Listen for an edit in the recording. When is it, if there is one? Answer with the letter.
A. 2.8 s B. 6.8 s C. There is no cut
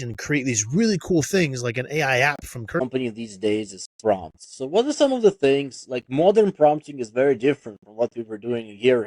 A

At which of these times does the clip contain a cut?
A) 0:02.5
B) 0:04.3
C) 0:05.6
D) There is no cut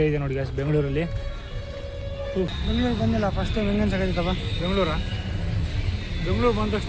A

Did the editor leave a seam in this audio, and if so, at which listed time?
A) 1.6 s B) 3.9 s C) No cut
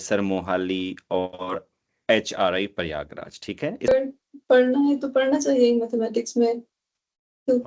B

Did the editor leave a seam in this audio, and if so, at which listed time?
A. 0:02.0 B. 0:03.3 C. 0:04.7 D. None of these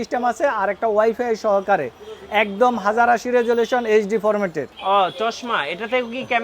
C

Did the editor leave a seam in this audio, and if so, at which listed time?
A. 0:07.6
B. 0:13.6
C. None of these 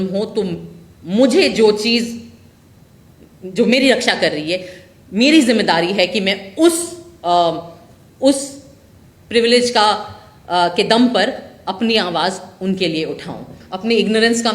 B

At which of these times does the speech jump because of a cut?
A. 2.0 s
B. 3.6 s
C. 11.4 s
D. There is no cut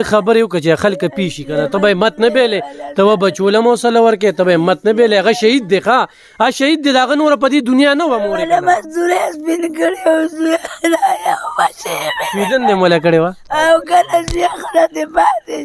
D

